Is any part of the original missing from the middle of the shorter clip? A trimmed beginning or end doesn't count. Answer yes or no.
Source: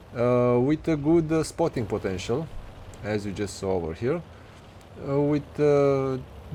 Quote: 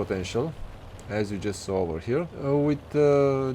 yes